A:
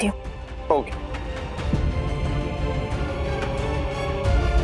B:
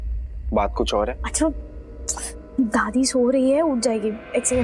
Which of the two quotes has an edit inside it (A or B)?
B